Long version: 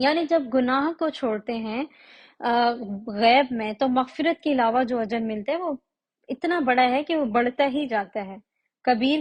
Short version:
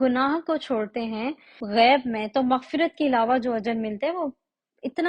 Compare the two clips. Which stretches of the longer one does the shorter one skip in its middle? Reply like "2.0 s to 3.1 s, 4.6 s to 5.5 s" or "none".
2.1 s to 3.0 s